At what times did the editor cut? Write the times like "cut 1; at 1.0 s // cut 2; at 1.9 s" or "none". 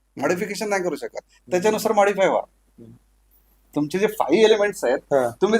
cut 1; at 3.7 s